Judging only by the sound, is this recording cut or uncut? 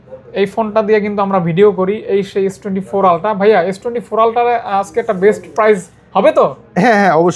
uncut